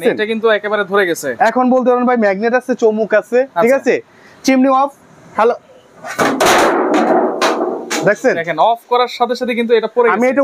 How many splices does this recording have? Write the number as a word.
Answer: zero